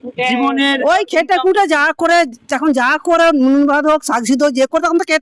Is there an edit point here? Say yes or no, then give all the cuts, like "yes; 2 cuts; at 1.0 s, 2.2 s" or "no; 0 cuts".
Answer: no; 0 cuts